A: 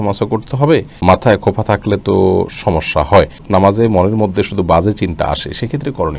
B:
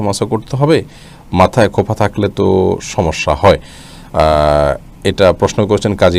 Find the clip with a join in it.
A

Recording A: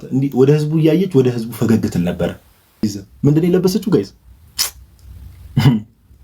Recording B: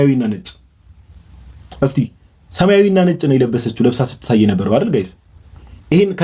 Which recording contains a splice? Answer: A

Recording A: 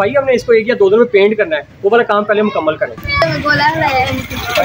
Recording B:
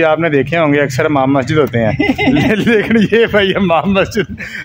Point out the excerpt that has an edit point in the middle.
A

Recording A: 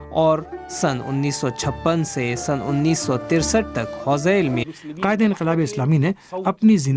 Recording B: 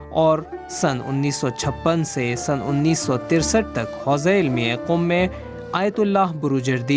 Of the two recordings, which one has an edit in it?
B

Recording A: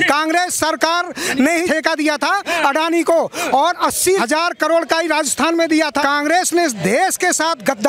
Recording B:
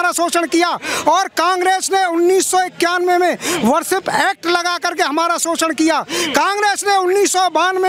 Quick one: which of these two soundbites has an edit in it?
A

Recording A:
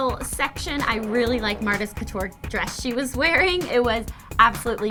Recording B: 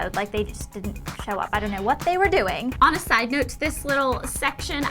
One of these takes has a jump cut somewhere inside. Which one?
B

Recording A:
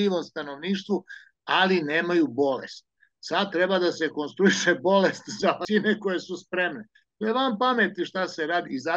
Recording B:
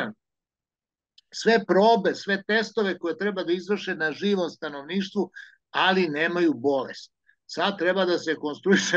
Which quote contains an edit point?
A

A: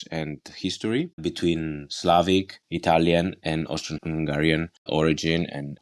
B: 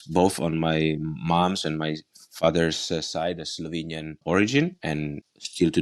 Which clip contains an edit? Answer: A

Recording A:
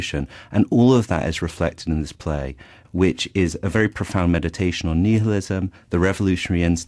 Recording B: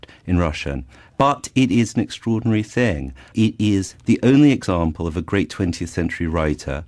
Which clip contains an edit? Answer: B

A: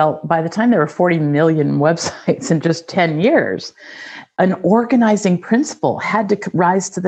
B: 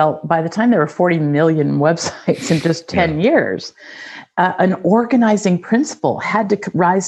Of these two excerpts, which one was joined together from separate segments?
A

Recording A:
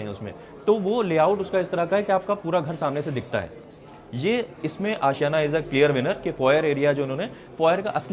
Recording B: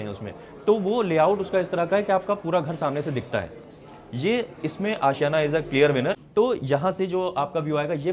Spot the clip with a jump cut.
B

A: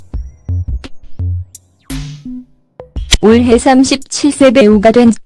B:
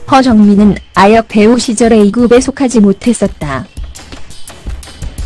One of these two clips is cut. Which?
B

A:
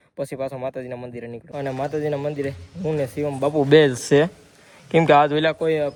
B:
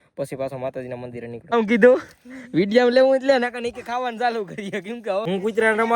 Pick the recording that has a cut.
B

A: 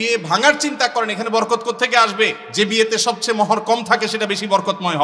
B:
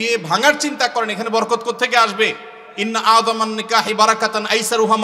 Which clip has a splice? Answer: A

